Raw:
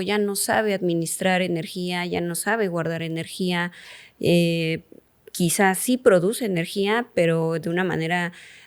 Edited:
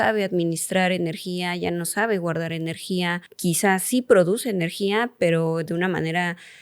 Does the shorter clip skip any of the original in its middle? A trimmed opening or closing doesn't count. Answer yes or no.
yes